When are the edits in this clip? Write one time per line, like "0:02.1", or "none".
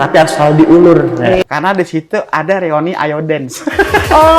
0:01.5